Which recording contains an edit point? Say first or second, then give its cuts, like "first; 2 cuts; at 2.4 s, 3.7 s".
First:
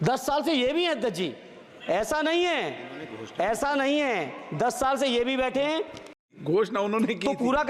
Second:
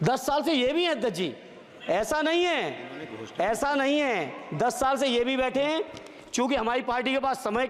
first; 1 cut; at 6.3 s